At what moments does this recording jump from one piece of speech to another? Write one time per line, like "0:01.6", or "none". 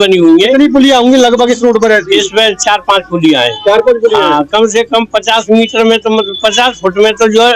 none